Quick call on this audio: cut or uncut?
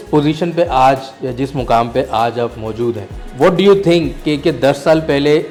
uncut